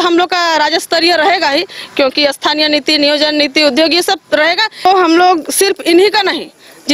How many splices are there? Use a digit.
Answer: 1